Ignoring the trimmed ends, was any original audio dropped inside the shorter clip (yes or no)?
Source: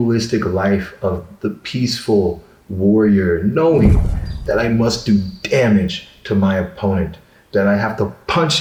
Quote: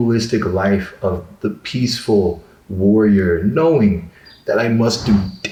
no